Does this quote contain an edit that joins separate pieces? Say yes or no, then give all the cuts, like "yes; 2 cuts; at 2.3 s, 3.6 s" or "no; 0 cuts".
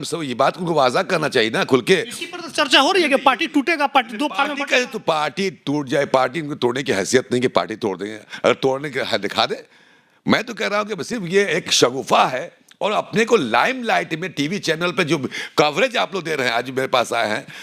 no; 0 cuts